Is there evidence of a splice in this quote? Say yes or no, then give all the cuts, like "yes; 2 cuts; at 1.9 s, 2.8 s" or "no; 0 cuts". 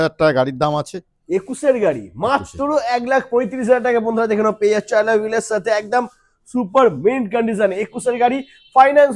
no; 0 cuts